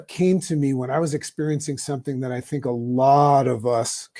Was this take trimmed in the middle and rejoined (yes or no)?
no